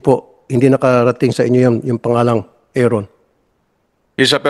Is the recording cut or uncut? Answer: uncut